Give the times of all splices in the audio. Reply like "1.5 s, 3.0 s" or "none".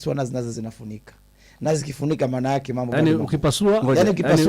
2.9 s